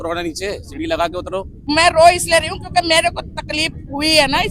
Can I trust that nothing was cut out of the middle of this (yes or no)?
no